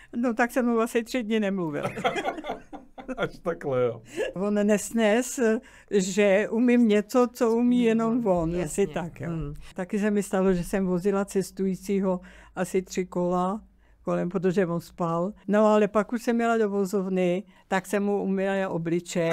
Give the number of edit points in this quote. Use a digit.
4